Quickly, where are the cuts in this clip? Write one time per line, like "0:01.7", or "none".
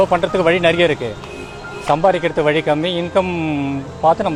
none